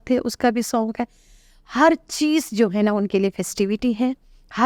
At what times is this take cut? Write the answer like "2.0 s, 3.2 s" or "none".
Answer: none